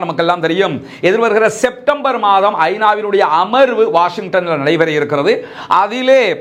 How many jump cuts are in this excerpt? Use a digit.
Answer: 0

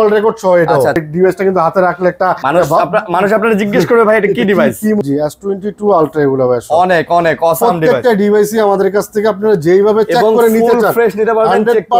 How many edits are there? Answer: 3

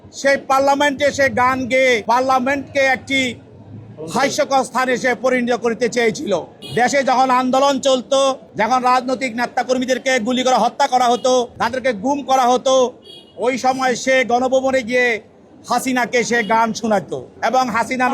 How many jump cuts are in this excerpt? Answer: 5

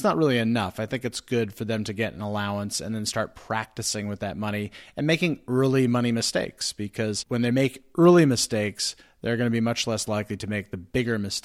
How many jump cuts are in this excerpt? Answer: 1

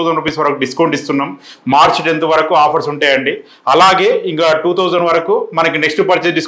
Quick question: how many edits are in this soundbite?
0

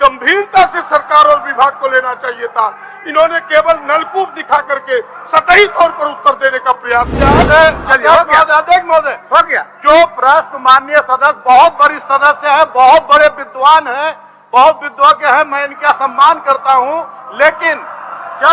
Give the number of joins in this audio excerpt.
1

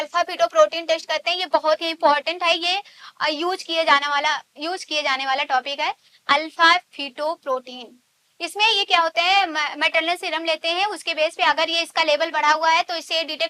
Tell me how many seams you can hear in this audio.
0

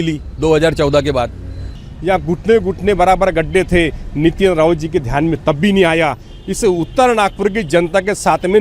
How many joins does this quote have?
1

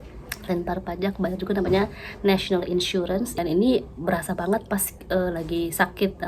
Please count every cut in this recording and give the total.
1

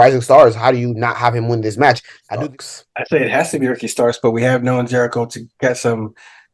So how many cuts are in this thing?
1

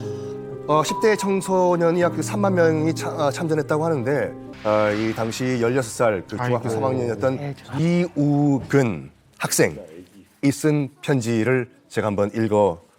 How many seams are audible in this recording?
1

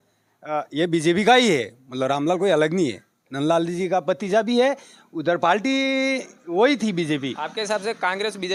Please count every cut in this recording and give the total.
0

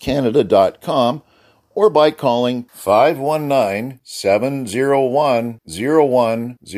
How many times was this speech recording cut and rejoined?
0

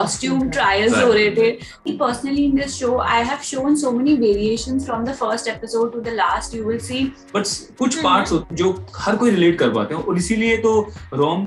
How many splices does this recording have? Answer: 2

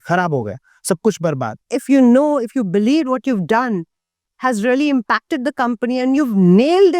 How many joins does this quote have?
1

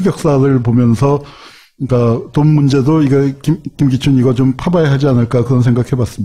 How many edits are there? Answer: 0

